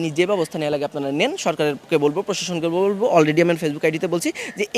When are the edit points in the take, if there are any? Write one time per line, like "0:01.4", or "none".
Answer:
none